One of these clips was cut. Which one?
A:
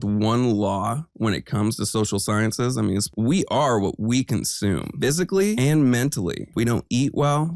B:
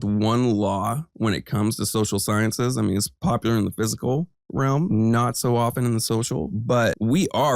A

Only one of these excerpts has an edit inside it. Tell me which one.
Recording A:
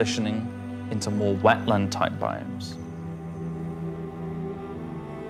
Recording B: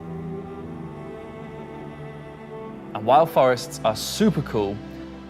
B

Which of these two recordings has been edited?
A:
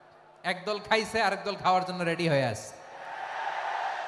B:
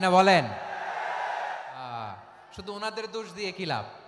B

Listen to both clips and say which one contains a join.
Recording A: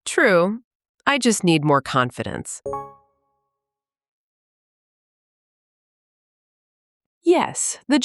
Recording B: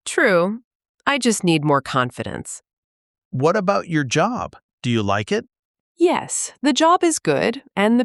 B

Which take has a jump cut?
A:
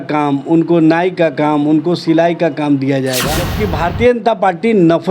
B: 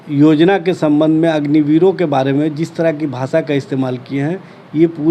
A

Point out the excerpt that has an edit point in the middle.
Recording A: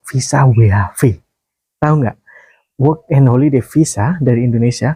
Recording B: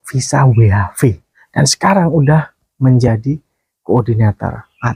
B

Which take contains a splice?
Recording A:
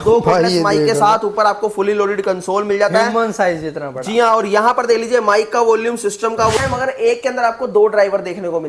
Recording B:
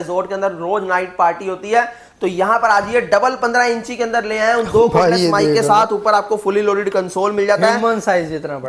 A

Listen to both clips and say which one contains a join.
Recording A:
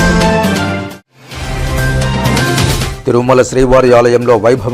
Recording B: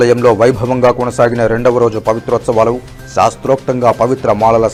A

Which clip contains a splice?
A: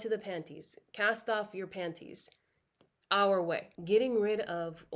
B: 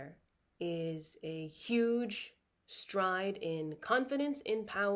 A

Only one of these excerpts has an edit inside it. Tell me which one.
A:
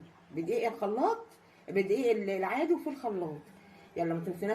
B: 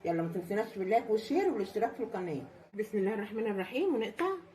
B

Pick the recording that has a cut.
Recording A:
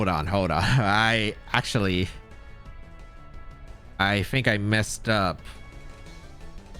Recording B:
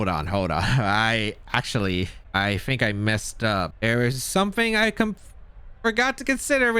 B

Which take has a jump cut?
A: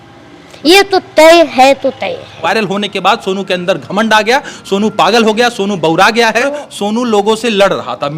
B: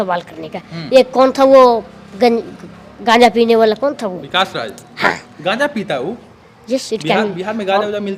A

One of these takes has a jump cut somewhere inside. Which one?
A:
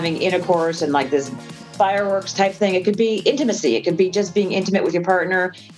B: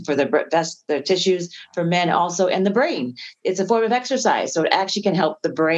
A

